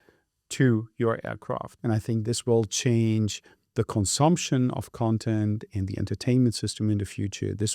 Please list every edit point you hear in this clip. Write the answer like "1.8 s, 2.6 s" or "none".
1.7 s

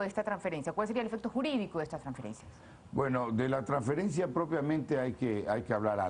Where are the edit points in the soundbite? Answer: 1.1 s

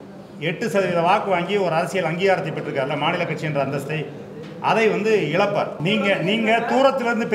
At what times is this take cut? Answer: 5.8 s

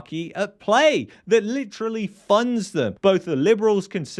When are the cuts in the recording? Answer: 2.9 s

